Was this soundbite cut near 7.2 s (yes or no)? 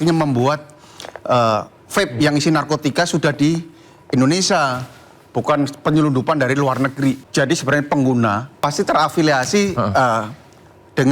yes